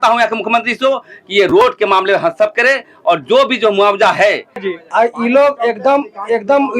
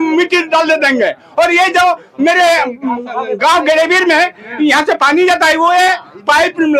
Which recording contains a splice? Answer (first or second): first